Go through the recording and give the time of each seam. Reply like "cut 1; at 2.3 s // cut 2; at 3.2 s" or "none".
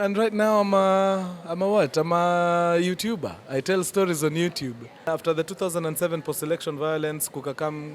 cut 1; at 5.1 s